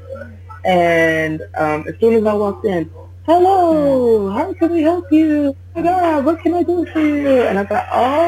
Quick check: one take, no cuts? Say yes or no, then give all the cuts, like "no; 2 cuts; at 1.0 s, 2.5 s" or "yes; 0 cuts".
yes; 0 cuts